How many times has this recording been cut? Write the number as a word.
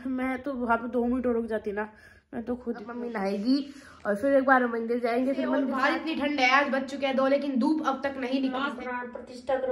three